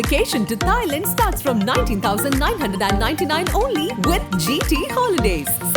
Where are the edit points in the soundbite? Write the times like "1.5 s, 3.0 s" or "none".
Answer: none